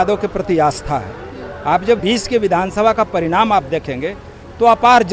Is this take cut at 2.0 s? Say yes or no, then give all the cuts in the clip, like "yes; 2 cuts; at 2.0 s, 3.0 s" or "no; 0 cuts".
yes; 1 cut; at 2.0 s